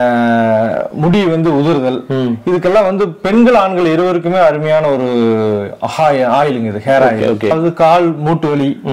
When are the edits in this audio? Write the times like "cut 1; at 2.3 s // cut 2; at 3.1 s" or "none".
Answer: cut 1; at 7.5 s